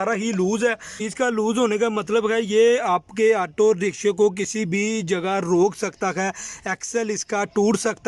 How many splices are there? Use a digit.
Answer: 0